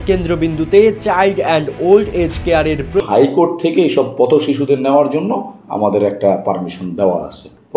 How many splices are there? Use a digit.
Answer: 1